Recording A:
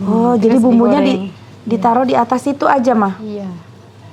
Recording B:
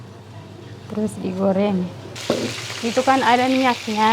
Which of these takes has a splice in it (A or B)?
B